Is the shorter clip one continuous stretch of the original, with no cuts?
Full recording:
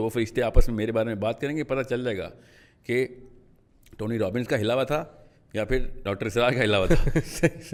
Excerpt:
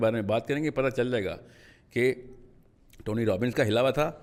yes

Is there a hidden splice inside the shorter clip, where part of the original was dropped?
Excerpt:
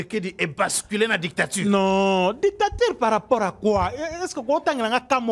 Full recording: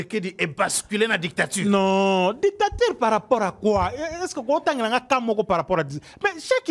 no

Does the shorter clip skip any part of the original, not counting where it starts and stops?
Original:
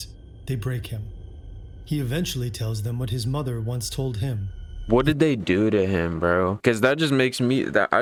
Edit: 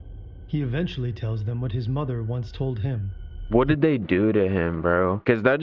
no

